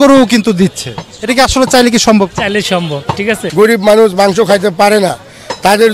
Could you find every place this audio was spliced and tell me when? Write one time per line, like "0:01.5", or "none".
0:03.4